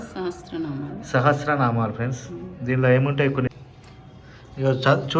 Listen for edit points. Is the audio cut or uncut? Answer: cut